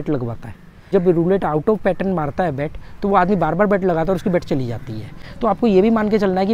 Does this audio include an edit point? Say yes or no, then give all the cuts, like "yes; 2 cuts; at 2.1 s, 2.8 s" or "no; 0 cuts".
yes; 1 cut; at 0.9 s